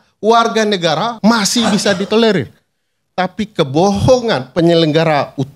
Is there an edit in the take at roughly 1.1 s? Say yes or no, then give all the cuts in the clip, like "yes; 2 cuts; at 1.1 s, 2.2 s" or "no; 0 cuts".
yes; 1 cut; at 1.1 s